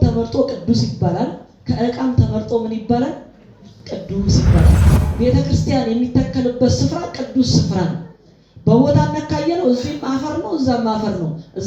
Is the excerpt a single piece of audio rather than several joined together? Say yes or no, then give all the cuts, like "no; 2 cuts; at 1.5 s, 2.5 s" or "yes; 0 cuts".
no; 1 cut; at 4.9 s